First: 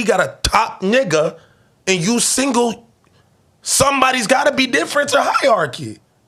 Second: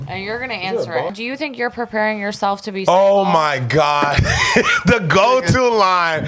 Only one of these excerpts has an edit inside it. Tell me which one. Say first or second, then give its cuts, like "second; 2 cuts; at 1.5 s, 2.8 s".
second; 1 cut; at 1.2 s